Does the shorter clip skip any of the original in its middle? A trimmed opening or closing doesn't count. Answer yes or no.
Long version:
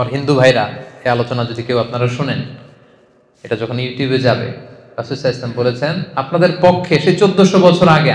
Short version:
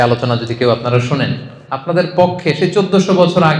yes